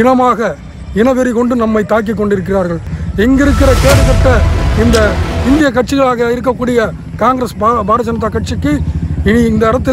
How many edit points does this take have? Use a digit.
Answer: 1